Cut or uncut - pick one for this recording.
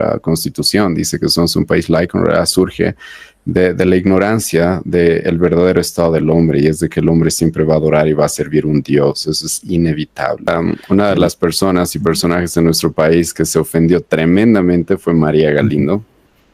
cut